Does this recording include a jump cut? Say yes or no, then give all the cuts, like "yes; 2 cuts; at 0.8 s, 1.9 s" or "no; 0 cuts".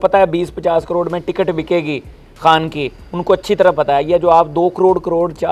no; 0 cuts